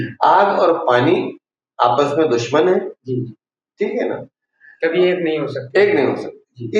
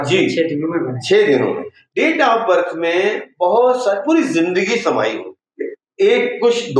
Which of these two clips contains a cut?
second; 2 cuts; at 1.9 s, 5.4 s

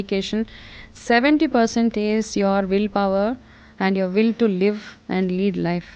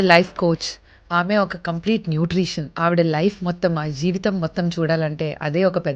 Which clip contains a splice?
second; 1 cut; at 2.8 s

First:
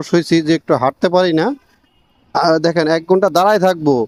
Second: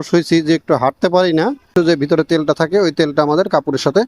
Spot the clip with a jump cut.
second; 1 cut; at 1.6 s

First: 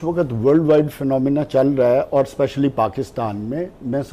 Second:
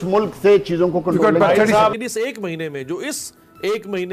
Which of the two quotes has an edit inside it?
second; 1 cut; at 2.0 s

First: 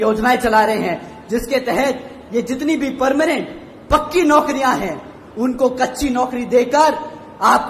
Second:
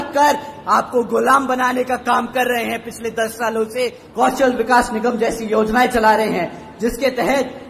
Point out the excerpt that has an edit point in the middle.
second; 1 cut; at 4.0 s

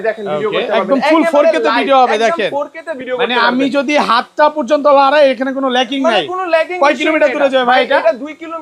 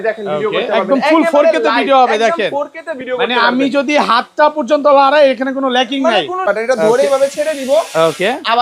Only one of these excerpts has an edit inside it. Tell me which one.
second; 1 cut; at 6.4 s

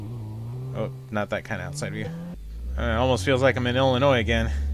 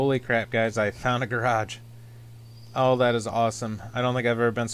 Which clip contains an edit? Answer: first; 1 cut; at 2.3 s

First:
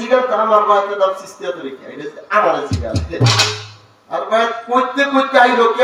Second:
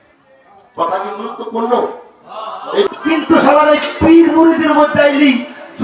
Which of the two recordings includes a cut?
second; 1 cut; at 2.9 s

